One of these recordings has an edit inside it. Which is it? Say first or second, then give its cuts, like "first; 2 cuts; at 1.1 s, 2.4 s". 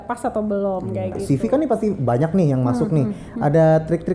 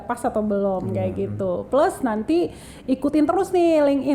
first; 1 cut; at 1.2 s